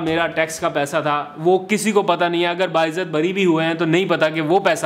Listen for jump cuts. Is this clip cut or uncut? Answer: uncut